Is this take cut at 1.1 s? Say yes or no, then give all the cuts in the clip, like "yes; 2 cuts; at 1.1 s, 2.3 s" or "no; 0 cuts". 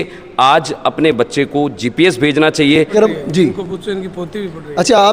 no; 1 cut; at 3.2 s